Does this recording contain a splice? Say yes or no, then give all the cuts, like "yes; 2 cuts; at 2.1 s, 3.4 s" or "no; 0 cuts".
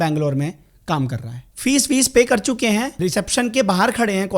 yes; 2 cuts; at 1.3 s, 2.9 s